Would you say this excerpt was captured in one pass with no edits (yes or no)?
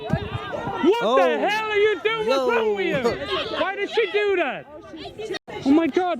no